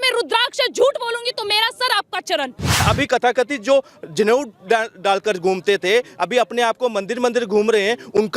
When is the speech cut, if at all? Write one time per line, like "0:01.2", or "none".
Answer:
0:02.8